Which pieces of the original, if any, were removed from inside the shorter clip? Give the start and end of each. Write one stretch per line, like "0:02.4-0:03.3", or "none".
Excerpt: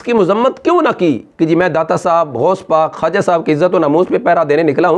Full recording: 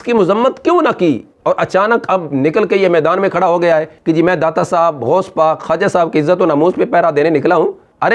0:01.3-0:03.9